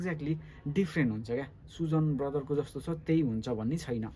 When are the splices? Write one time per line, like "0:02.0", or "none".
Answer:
none